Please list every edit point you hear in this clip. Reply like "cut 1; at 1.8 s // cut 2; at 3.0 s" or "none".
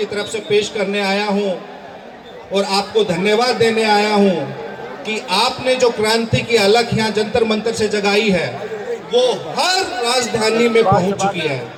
none